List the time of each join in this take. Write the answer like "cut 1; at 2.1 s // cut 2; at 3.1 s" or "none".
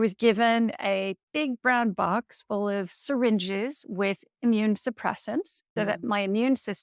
cut 1; at 5.6 s